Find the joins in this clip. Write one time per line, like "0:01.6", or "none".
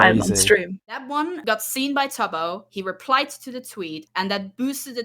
0:01.0